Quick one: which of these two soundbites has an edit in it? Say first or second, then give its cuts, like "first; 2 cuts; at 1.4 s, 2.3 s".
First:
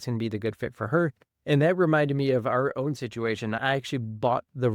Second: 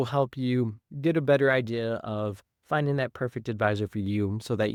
first; 1 cut; at 3.6 s